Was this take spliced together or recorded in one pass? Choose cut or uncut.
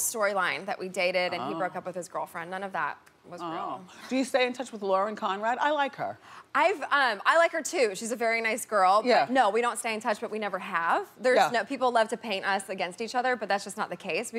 uncut